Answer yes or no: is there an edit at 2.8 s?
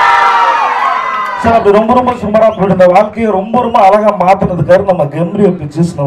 no